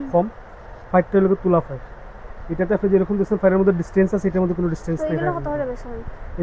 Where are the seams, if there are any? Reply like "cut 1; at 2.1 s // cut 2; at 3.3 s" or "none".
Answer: none